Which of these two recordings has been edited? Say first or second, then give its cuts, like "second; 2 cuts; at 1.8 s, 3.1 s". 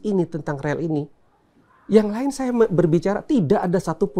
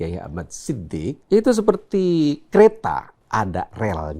second; 2 cuts; at 1.2 s, 3.2 s